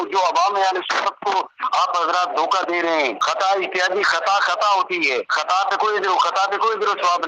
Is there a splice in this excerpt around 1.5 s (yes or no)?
no